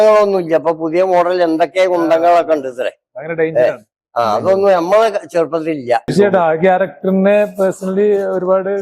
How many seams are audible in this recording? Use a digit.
1